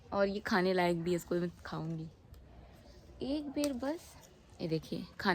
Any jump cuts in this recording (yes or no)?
no